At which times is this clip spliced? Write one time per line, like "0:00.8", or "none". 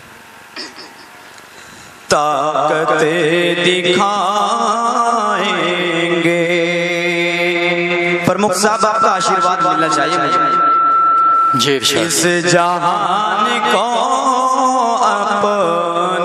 none